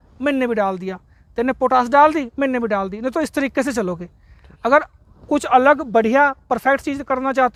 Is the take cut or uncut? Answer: uncut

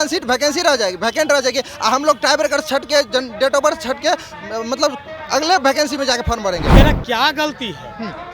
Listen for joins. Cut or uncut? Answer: cut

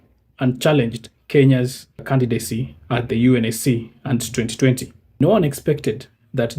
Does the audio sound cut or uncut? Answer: cut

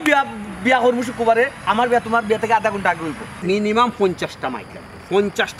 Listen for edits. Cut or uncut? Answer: cut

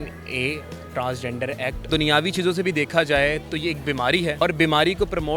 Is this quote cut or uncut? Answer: cut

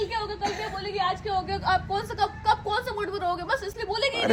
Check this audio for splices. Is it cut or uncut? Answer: uncut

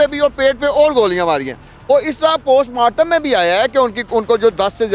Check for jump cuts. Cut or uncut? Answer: uncut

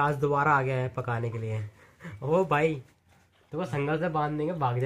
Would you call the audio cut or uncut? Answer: uncut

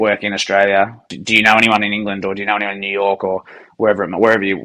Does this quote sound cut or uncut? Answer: cut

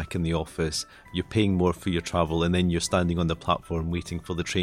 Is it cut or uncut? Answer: uncut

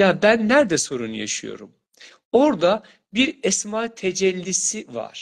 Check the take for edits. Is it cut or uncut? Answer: uncut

